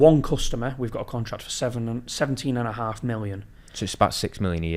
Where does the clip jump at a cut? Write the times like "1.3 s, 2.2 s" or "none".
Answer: none